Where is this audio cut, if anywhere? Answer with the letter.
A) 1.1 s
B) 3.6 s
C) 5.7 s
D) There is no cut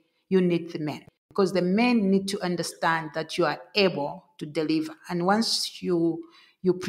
A